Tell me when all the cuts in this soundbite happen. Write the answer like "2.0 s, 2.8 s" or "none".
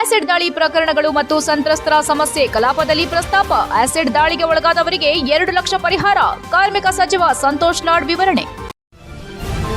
8.8 s